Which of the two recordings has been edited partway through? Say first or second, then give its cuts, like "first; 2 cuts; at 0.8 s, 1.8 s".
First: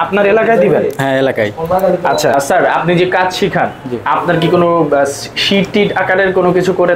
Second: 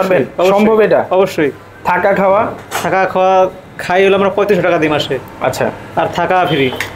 first; 1 cut; at 2.3 s